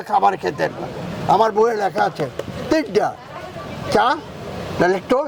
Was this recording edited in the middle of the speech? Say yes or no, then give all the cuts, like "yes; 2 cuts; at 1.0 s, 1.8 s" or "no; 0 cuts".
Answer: no; 0 cuts